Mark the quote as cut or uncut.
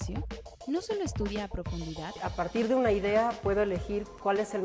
cut